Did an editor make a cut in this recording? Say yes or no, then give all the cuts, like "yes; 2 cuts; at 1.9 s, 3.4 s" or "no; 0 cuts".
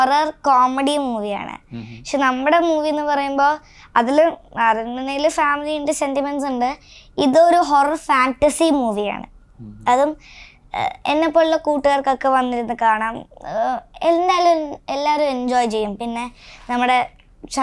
no; 0 cuts